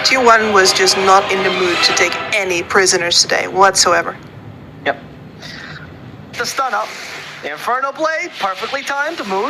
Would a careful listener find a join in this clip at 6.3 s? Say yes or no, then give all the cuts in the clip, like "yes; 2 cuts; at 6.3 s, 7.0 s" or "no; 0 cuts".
yes; 1 cut; at 6.3 s